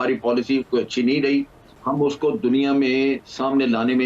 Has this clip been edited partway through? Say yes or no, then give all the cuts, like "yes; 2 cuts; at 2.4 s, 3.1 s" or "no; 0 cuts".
yes; 1 cut; at 1.8 s